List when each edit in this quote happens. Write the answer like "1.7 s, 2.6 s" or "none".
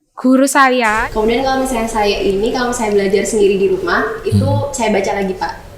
1.0 s